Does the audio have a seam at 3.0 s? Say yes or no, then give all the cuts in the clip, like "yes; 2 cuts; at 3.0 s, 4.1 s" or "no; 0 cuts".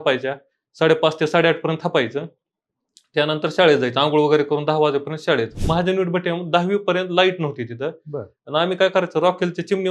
no; 1 cut; at 5.6 s